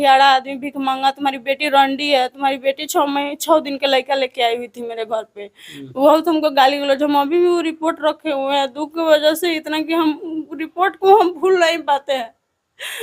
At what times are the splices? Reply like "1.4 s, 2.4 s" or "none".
none